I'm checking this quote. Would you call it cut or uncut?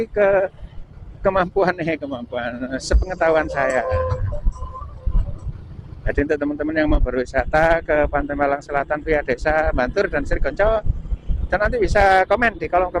uncut